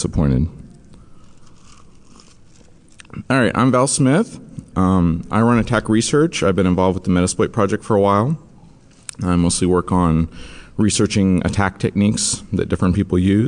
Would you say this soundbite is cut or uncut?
uncut